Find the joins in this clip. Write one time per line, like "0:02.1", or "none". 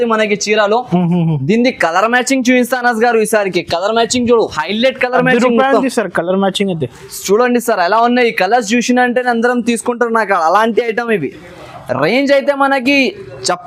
none